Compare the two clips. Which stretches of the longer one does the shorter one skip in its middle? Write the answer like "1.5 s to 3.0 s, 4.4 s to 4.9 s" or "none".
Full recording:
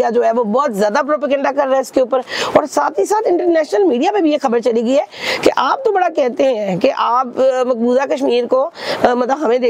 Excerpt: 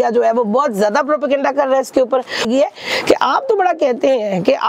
2.5 s to 4.8 s